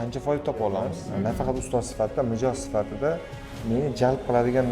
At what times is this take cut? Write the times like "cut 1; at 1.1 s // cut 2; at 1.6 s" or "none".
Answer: cut 1; at 1.0 s